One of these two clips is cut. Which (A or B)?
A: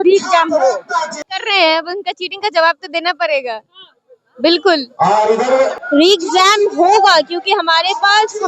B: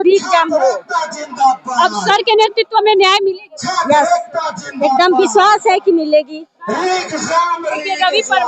A